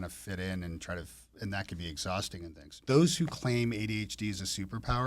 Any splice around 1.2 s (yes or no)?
no